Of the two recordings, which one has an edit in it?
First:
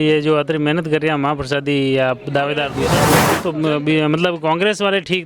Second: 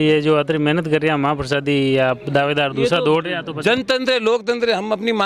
first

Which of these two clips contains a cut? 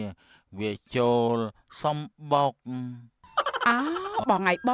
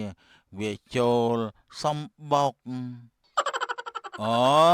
first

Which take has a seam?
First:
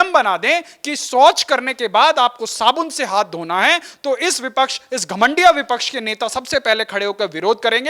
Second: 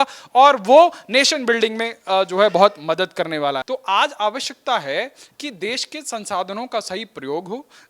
second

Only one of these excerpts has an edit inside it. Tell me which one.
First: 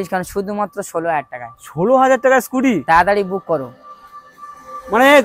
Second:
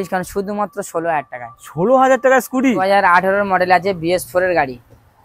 second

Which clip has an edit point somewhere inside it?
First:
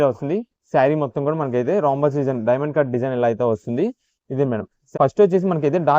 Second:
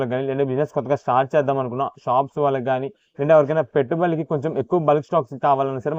first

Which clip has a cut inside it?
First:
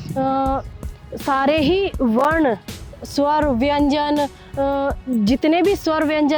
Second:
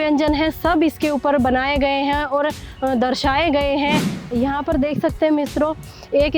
second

